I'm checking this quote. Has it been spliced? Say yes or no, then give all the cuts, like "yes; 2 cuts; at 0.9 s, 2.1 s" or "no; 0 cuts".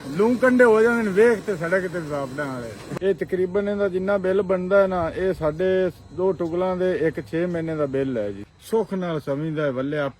yes; 2 cuts; at 2.8 s, 8.4 s